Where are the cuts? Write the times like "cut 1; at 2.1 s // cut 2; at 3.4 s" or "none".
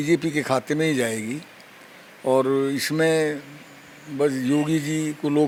none